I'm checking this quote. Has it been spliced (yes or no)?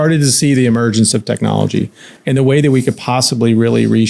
no